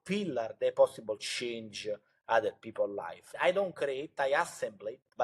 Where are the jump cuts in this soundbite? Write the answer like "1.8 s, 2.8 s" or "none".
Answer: 3.2 s

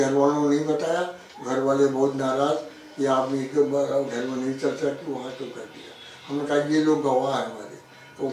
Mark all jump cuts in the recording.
none

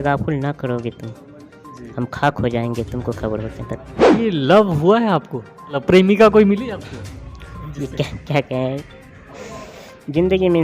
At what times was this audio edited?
4.1 s, 5.7 s

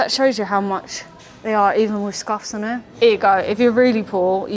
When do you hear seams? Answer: none

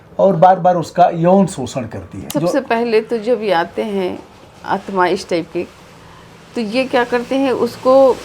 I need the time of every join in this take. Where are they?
2.3 s

